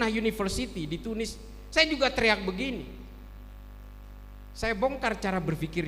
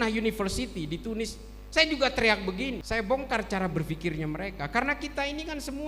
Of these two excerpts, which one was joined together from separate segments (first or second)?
second